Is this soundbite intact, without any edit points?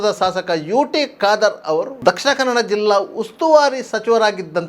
no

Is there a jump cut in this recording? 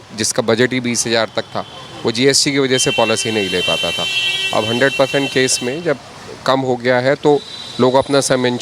no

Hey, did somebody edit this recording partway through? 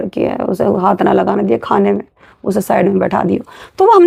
no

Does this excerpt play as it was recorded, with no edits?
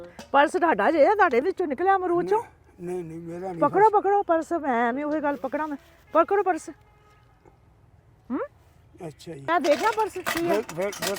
no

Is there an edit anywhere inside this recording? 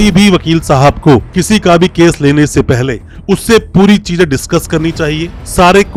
no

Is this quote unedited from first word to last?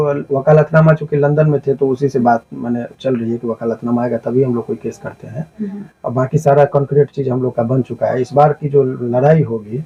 yes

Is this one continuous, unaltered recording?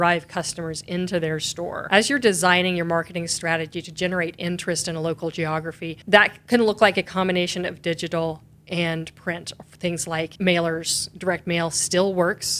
no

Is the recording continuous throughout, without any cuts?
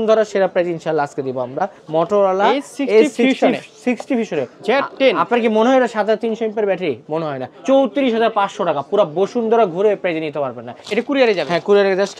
no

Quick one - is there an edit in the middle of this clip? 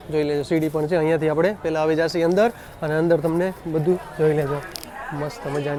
no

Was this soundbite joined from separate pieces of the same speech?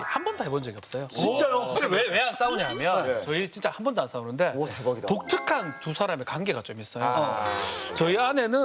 yes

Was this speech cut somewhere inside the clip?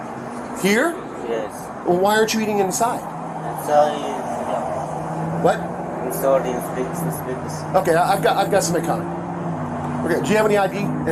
no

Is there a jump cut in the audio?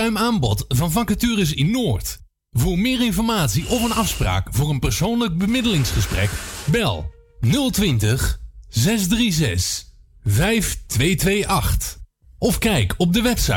no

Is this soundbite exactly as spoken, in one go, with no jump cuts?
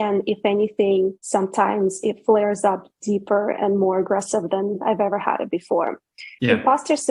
no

